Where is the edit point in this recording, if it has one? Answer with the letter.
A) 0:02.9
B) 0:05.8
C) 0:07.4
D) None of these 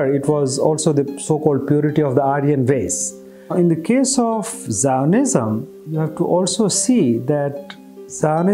B